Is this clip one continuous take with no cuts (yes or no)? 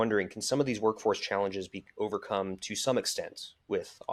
yes